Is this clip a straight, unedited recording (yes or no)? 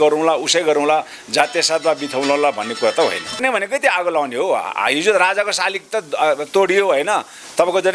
no